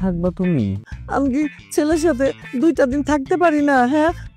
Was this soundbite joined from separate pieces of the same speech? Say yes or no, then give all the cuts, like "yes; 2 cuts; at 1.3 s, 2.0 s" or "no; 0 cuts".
yes; 1 cut; at 0.9 s